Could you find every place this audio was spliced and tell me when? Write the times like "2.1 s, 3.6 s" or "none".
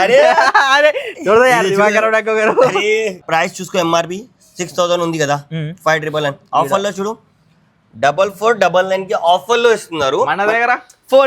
3.2 s